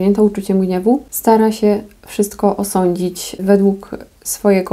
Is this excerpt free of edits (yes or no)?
no